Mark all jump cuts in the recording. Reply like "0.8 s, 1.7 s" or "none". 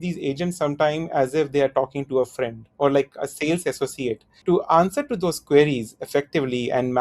4.3 s